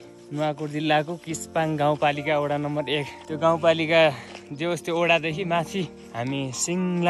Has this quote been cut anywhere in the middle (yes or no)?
no